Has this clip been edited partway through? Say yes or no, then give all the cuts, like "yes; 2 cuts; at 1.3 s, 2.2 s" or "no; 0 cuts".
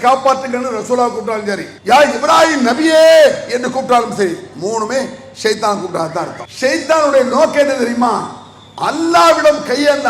yes; 2 cuts; at 1.7 s, 6.4 s